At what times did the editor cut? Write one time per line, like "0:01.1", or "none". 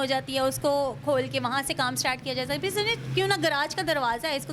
none